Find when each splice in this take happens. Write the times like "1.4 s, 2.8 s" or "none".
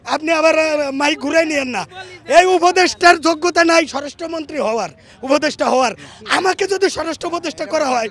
none